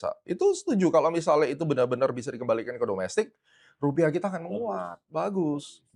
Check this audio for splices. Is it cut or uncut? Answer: uncut